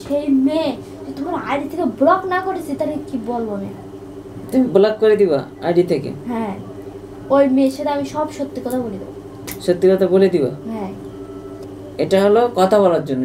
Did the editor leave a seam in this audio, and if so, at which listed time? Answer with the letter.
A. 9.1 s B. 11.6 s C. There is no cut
B